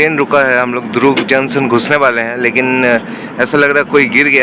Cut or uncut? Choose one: uncut